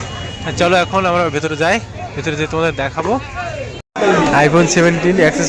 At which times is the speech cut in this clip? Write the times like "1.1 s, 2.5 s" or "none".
3.8 s